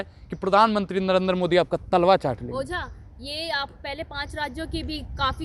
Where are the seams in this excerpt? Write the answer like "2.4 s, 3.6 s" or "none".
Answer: none